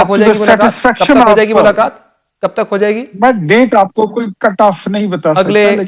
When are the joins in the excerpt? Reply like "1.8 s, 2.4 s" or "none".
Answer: none